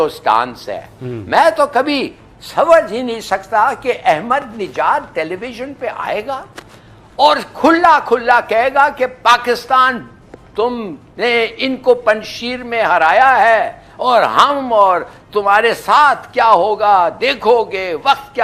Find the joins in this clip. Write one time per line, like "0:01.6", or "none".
none